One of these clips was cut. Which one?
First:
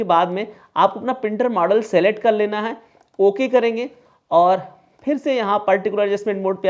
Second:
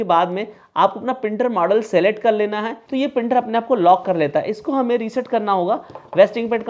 second; 1 cut; at 2.8 s

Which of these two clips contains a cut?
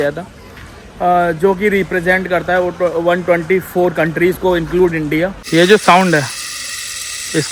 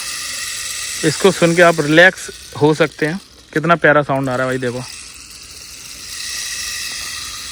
first; 1 cut; at 5.4 s

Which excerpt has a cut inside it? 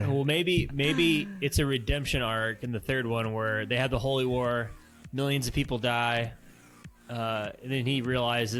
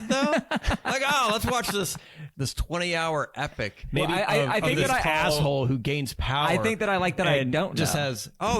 second; 1 cut; at 2.3 s

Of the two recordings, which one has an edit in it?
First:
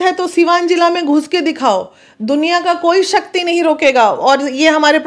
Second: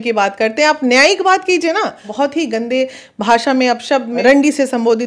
second; 2 cuts; at 2.1 s, 4.2 s

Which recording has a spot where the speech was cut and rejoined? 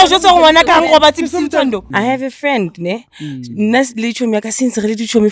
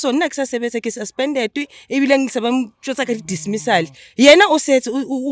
first; 1 cut; at 1.8 s

